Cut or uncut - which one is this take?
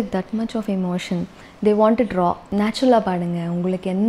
uncut